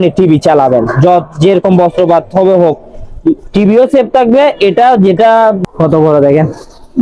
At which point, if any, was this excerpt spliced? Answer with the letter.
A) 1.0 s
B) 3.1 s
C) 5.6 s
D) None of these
C